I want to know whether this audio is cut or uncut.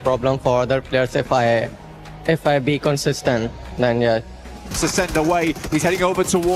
uncut